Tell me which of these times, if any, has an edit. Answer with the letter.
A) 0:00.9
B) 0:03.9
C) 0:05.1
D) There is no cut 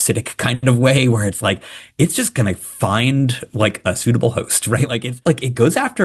C